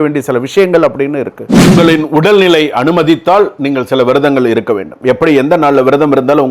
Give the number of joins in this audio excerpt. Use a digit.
1